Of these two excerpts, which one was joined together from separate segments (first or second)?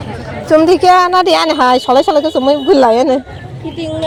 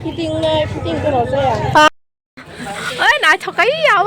second